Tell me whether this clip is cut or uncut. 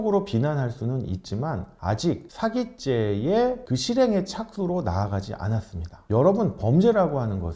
uncut